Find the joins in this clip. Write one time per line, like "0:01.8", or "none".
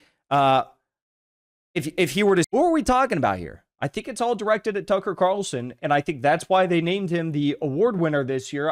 0:02.5